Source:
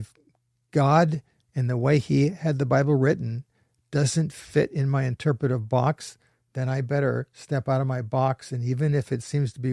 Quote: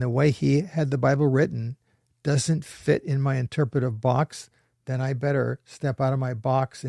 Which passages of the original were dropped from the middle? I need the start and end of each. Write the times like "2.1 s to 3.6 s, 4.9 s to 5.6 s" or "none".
none